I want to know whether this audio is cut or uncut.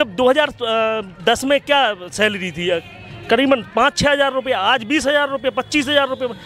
uncut